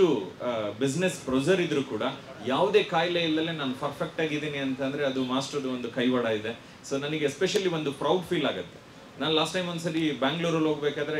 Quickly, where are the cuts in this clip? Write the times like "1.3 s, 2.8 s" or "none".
6.6 s